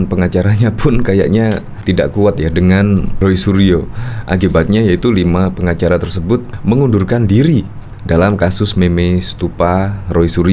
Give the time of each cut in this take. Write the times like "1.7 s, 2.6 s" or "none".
1.7 s, 3.2 s, 6.5 s